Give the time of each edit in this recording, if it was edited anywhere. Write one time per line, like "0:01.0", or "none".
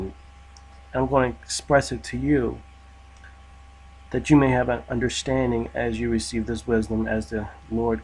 0:04.5